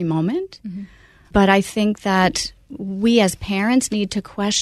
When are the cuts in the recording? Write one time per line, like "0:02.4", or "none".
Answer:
0:01.3